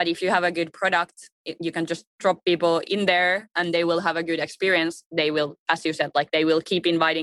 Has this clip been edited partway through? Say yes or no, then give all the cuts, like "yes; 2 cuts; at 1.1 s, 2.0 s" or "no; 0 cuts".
yes; 1 cut; at 2.8 s